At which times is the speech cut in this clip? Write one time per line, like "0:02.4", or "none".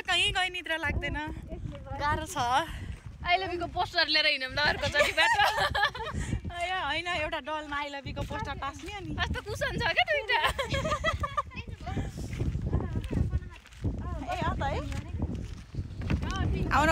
none